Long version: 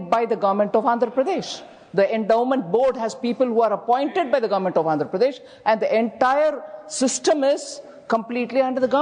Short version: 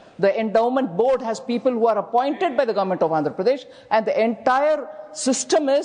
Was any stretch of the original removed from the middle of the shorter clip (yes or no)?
no